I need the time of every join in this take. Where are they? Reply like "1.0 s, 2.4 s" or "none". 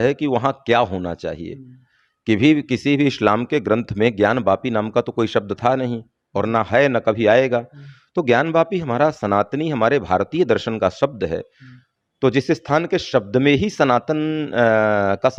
none